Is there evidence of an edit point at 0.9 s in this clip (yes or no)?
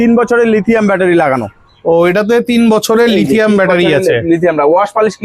no